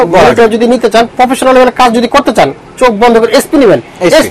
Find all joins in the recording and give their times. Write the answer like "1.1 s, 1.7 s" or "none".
none